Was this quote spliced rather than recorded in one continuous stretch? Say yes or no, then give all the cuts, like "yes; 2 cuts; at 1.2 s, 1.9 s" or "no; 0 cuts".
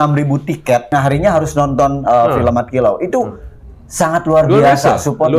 yes; 1 cut; at 0.9 s